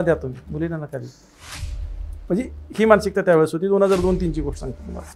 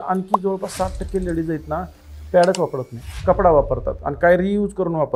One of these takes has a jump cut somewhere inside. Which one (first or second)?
second